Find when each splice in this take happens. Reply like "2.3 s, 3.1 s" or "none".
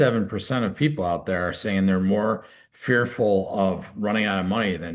none

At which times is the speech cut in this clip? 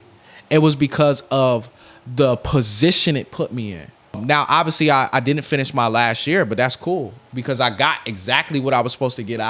4.2 s

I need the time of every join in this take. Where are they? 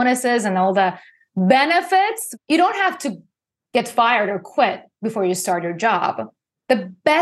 2.3 s

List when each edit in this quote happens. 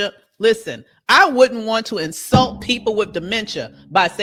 none

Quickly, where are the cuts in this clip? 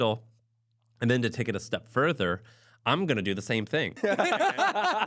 3.9 s

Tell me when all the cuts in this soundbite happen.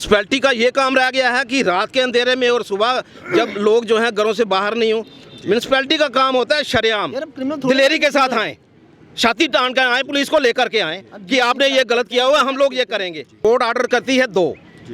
13.4 s

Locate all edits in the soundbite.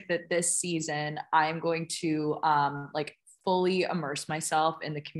none

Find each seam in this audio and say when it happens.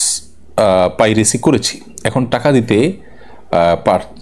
none

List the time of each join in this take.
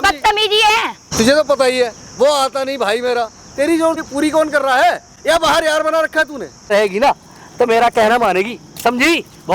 1.0 s, 4.0 s, 6.7 s

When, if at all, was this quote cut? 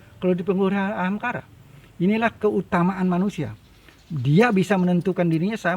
none

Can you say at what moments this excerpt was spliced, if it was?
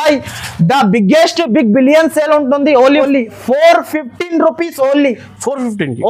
2.9 s

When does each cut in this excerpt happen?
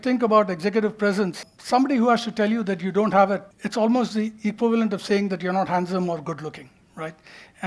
1.5 s, 3.6 s

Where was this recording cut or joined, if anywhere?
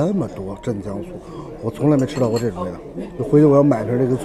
none

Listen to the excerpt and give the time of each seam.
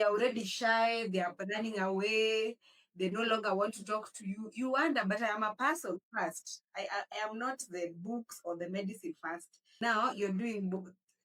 none

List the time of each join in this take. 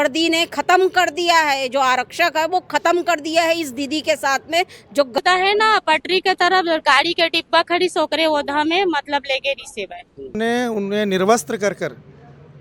5.2 s, 10.4 s

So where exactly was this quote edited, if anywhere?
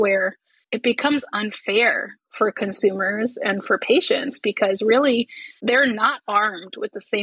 none

